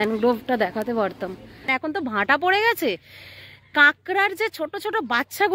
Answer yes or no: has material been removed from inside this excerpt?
yes